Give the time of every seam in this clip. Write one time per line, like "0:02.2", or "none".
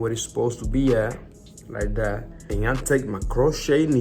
0:02.3